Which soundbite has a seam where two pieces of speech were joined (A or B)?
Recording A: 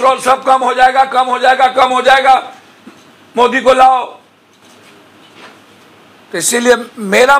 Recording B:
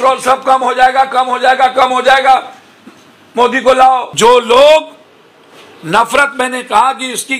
B